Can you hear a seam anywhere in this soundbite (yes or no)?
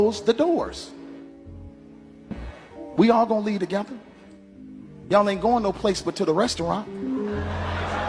no